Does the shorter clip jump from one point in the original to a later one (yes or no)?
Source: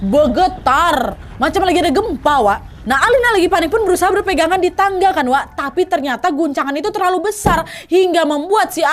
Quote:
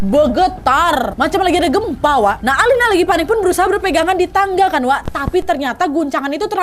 yes